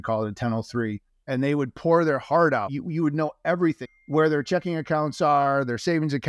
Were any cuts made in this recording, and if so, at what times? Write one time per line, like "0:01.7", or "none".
0:01.1
0:02.7
0:03.8